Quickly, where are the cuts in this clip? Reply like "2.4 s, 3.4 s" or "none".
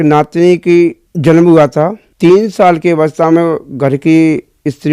1.1 s, 2.0 s